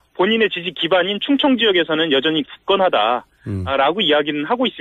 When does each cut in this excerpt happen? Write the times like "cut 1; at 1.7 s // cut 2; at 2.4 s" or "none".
none